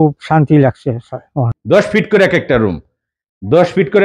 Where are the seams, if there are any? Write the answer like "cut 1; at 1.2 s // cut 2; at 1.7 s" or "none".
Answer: cut 1; at 1.4 s